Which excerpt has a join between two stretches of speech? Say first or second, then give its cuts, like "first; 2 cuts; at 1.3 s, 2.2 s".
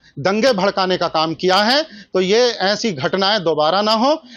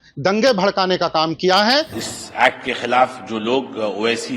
second; 1 cut; at 2.0 s